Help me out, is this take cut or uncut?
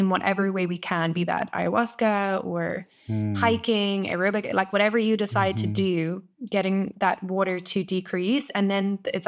uncut